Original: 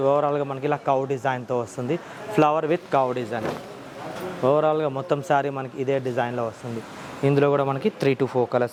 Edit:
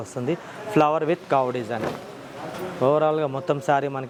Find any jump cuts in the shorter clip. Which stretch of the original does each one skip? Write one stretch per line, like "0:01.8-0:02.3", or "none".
none